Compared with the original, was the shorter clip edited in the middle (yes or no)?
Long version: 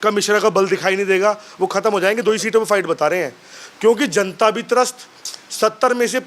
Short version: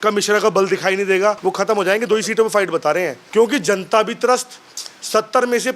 yes